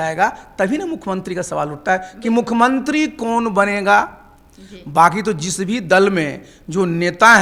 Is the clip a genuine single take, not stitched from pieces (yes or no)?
yes